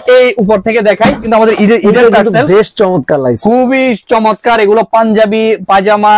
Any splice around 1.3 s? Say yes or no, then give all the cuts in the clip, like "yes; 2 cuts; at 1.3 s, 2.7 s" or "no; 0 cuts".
yes; 1 cut; at 1.3 s